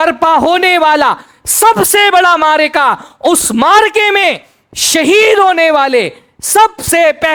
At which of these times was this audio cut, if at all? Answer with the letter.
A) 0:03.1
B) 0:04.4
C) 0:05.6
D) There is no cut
D